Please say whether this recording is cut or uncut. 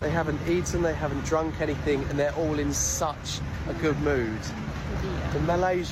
uncut